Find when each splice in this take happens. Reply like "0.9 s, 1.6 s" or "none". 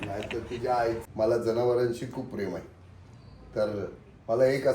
1.0 s

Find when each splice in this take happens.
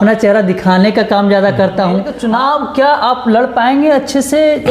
2.1 s

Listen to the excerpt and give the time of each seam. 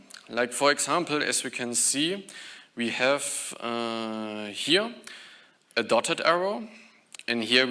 none

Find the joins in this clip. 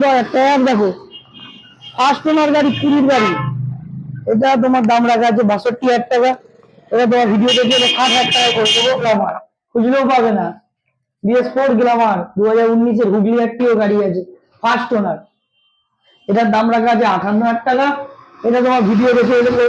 9.0 s

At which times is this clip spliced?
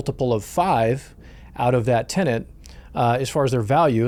none

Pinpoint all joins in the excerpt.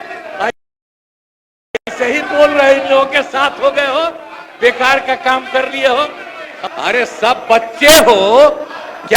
6.5 s

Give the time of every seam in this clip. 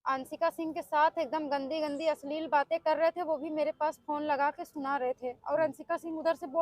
none

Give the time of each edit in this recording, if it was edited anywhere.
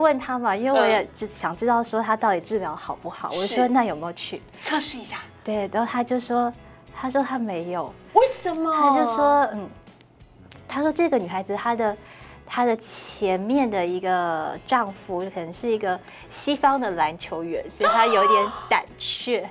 none

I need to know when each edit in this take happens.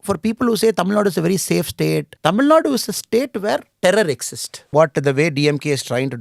2.1 s, 3.7 s, 4.7 s

